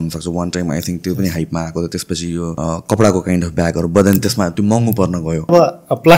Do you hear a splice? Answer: yes; 2 cuts; at 2.5 s, 5.5 s

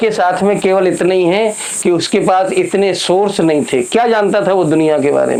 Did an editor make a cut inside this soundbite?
no; 0 cuts

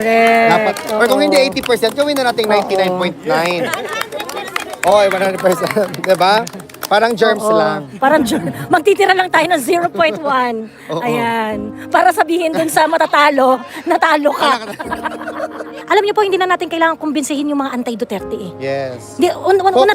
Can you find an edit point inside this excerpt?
yes; 1 cut; at 15.7 s

